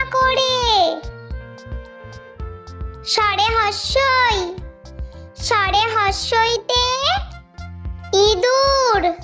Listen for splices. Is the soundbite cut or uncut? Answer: uncut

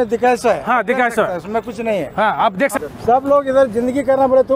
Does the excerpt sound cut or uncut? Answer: cut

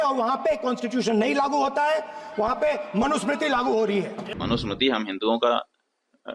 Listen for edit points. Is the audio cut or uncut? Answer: cut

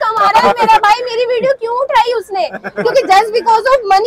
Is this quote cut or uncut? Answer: uncut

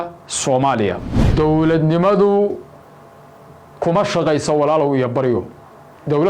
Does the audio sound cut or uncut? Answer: cut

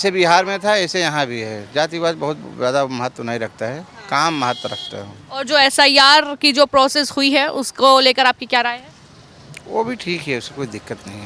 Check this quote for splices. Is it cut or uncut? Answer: uncut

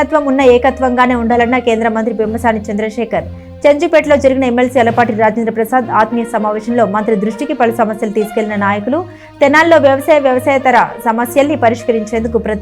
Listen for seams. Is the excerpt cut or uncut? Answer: uncut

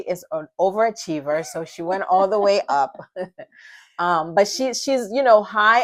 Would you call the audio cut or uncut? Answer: uncut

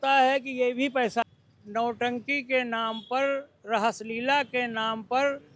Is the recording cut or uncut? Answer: cut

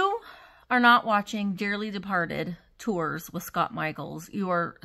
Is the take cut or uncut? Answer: uncut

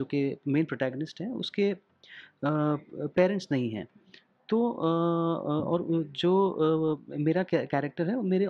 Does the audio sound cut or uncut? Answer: uncut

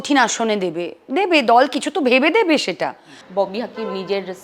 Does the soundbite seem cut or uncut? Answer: cut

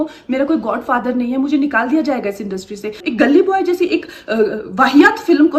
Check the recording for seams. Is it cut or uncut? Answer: cut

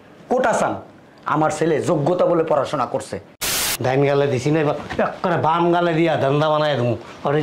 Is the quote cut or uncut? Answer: cut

